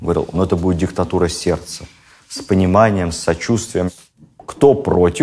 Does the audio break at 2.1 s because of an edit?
no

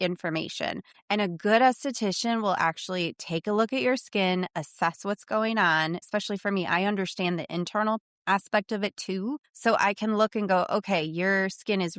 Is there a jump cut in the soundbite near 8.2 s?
no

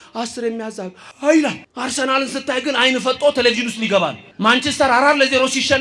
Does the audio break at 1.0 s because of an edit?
yes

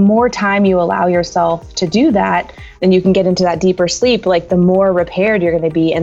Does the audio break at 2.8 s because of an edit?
yes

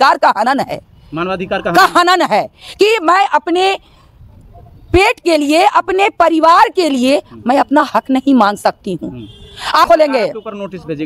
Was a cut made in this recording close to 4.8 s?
no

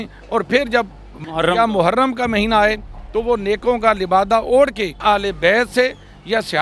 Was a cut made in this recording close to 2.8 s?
no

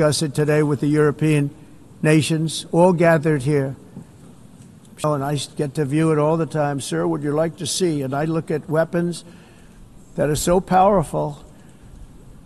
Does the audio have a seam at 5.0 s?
yes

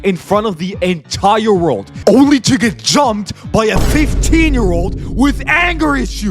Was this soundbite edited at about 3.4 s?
no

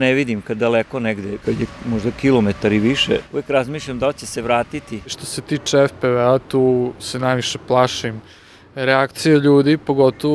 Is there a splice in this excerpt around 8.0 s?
no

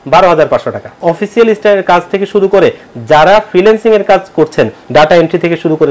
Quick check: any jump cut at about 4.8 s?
yes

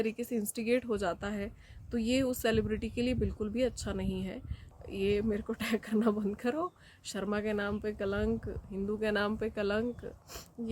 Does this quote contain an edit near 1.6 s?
no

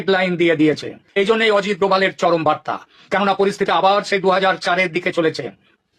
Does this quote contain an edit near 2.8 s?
no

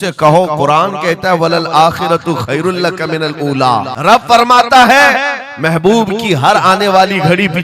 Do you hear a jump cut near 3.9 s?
yes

